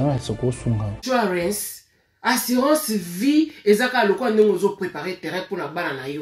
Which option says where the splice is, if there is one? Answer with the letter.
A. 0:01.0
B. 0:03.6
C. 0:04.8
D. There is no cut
A